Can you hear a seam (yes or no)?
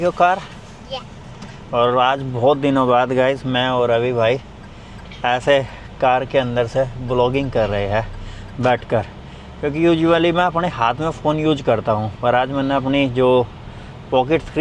no